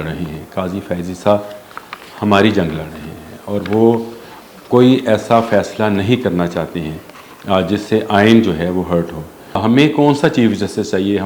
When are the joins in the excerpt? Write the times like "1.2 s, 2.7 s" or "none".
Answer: 9.6 s